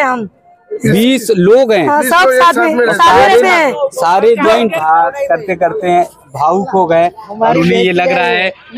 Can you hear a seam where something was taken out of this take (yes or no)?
yes